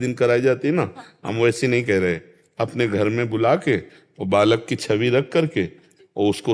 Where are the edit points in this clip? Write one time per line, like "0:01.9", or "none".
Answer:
none